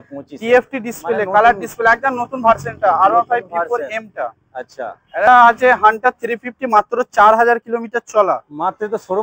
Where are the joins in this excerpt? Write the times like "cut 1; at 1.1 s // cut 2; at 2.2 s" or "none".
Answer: cut 1; at 5.3 s